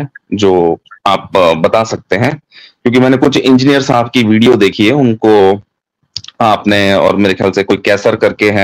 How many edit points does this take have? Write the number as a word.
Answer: zero